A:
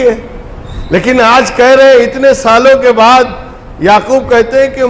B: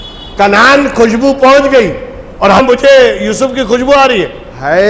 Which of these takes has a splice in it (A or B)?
B